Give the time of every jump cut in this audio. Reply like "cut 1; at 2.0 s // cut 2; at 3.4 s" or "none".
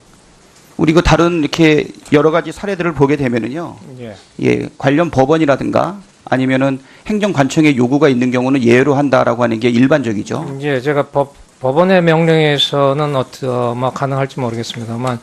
cut 1; at 13.3 s